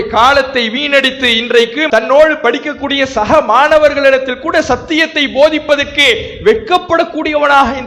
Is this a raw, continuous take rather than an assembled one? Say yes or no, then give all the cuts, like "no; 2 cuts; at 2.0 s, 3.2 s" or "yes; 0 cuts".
yes; 0 cuts